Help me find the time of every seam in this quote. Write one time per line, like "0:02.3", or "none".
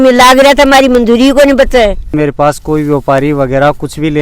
0:02.1